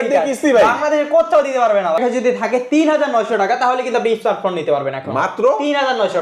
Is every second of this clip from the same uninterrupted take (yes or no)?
no